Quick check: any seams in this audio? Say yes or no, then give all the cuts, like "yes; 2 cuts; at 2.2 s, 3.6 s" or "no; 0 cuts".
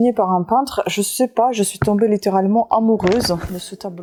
no; 0 cuts